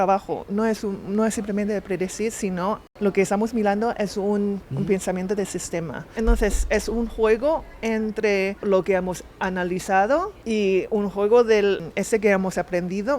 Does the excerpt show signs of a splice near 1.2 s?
no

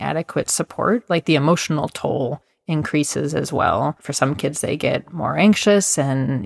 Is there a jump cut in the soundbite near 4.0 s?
yes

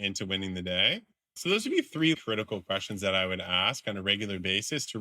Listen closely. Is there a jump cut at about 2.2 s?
yes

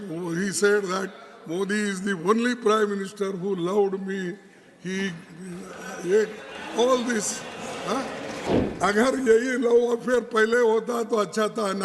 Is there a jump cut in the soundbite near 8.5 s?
yes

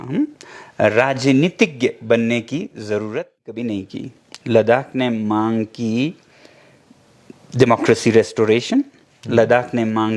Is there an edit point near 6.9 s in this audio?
no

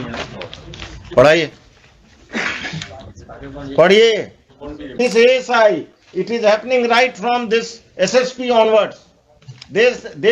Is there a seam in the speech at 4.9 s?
yes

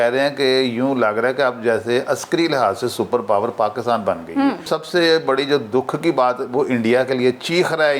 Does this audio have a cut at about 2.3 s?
no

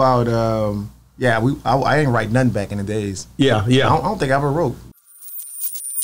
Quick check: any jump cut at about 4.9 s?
yes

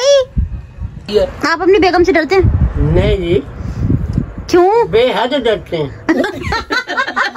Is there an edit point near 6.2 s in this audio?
yes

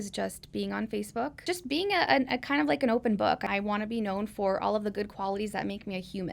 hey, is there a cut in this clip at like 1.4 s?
yes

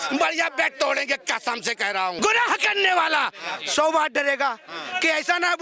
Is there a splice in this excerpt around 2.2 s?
yes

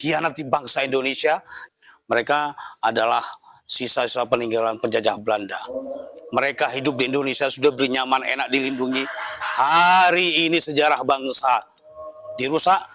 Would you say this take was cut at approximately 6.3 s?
no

